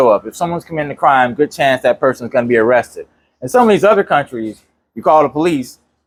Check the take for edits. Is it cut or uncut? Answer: uncut